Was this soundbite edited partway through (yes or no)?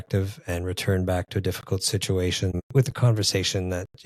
no